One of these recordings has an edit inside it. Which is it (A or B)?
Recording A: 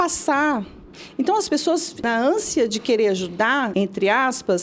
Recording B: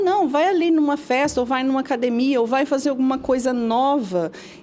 A